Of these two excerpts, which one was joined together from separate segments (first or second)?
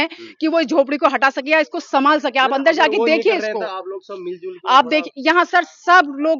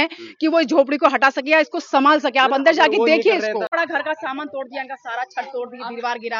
second